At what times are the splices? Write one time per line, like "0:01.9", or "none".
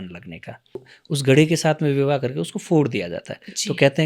0:00.9